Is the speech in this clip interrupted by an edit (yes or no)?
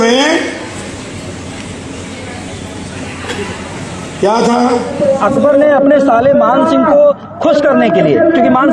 yes